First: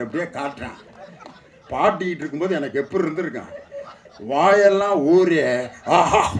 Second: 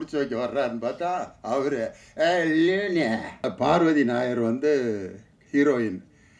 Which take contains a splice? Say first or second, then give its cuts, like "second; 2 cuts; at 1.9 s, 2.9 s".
second; 1 cut; at 3.5 s